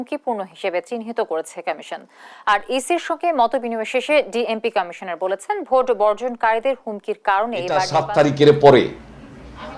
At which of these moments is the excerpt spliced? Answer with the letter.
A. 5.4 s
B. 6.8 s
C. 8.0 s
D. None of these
C